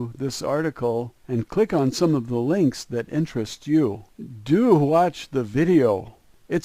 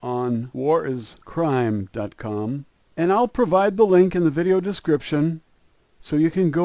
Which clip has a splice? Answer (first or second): first